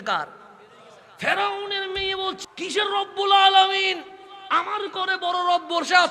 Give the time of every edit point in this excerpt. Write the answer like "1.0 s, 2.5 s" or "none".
2.3 s